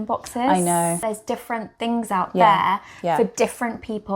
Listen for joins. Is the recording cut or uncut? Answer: cut